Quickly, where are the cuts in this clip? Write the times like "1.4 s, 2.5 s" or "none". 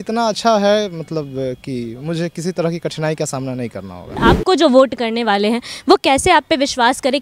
4.2 s

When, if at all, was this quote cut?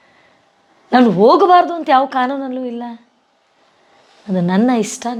none

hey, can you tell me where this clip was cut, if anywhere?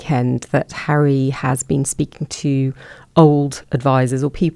none

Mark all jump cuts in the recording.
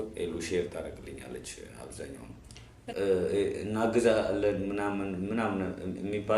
2.8 s

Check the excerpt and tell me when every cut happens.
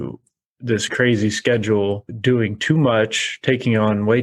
0.9 s, 2.1 s

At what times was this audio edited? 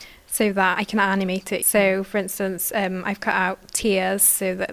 none

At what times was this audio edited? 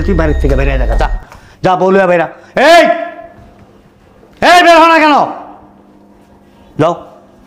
none

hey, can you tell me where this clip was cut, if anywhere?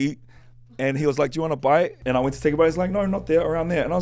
2.0 s

